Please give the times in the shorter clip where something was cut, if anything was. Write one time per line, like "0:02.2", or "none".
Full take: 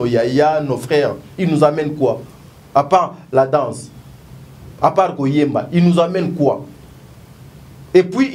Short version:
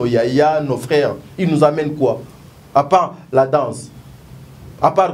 none